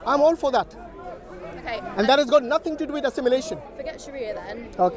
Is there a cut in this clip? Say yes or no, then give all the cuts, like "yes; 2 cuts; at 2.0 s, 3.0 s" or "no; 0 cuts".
yes; 1 cut; at 3.7 s